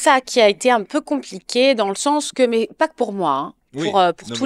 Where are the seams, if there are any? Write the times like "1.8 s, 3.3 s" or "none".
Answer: none

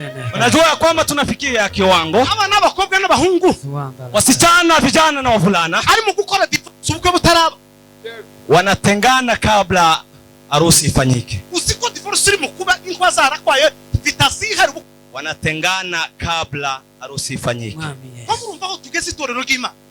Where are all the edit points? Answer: 14.8 s

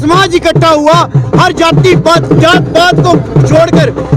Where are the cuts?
none

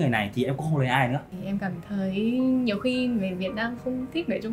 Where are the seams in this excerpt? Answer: 1.3 s

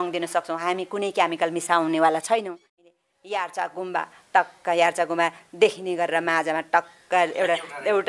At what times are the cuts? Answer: 2.8 s

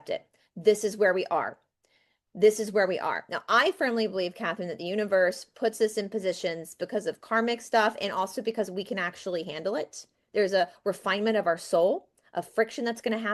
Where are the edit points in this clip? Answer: none

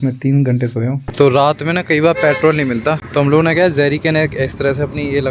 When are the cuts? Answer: 1.1 s, 3.0 s

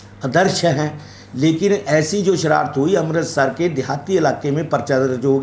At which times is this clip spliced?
none

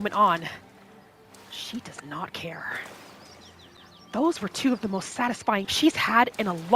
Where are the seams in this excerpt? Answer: 5.7 s

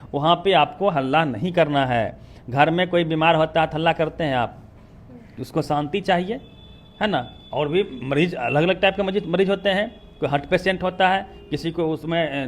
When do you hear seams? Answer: none

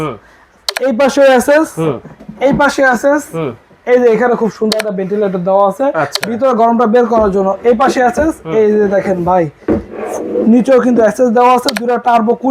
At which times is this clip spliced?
none

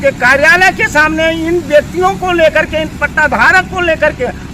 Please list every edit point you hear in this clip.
none

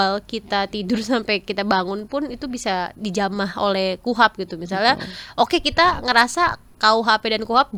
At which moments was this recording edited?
none

